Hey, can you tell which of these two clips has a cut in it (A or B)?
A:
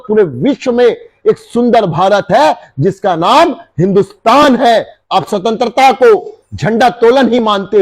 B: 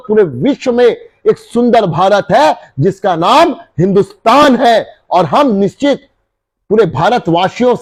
A